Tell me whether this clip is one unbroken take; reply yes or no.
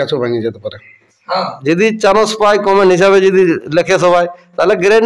no